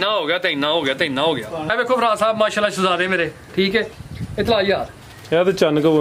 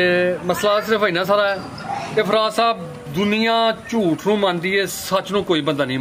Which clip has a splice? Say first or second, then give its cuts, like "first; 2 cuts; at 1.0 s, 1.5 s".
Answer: first; 1 cut; at 1.7 s